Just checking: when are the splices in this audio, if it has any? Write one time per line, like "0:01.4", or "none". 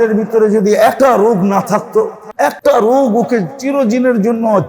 0:00.9
0:02.5